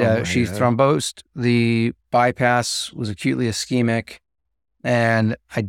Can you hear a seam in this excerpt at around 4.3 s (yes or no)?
no